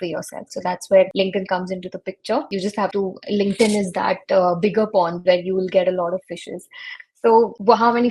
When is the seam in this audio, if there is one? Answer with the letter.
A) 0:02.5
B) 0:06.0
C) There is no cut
C